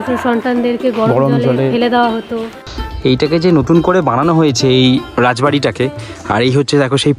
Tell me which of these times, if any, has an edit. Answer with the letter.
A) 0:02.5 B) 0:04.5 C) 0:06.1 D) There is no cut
D